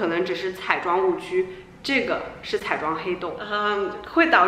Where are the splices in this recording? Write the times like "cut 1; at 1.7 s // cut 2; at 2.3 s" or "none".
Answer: cut 1; at 3.5 s